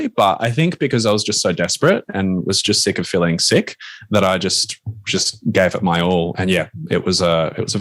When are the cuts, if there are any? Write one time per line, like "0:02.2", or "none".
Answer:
none